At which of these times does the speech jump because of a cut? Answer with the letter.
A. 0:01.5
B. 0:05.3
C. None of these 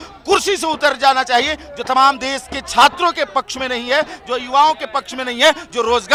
C